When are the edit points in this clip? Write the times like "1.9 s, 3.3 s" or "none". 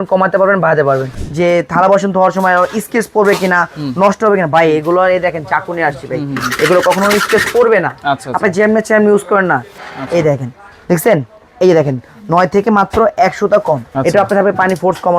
1.2 s, 9.7 s, 13.9 s